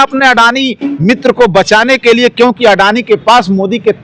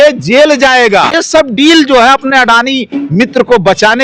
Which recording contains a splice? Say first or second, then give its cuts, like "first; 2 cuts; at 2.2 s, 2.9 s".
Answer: second; 1 cut; at 1.2 s